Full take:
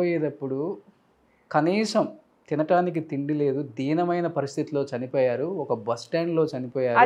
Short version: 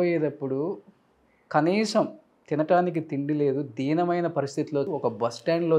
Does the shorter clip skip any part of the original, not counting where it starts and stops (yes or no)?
yes